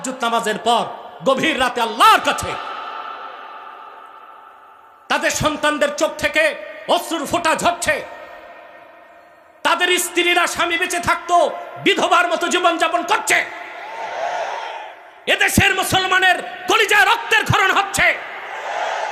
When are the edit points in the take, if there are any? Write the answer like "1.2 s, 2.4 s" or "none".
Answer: none